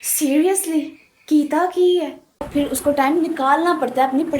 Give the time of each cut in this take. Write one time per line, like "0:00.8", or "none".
0:02.5